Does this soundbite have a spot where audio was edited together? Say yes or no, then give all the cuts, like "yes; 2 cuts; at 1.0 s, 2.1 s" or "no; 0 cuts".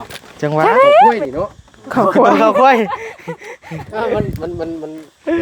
yes; 1 cut; at 1.2 s